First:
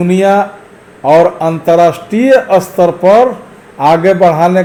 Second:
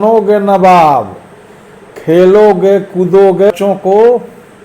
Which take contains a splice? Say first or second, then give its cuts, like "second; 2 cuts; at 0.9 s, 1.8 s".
second; 1 cut; at 3.5 s